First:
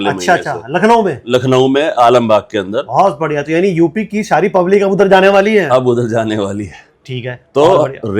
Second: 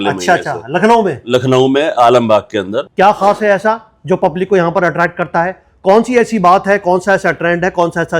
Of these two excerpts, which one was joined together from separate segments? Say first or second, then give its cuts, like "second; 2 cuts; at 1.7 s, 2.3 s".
second; 1 cut; at 2.8 s